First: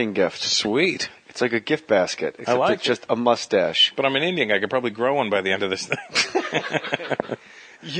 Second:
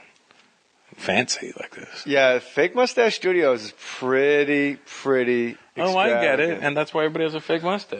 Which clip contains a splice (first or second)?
second